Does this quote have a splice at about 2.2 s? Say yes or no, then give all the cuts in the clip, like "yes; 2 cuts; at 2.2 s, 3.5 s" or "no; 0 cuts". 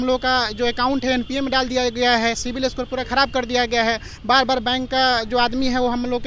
no; 0 cuts